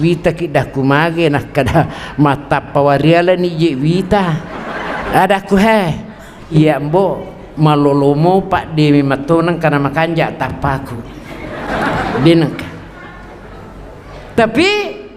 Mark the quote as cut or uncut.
cut